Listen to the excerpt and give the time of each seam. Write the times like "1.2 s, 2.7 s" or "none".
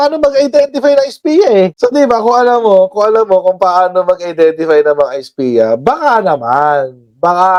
none